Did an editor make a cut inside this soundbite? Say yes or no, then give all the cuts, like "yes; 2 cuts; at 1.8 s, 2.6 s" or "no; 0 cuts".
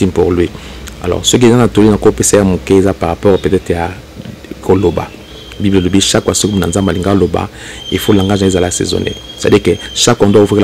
no; 0 cuts